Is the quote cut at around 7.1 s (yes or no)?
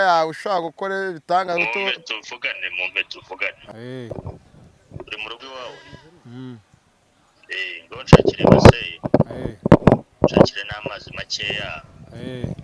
no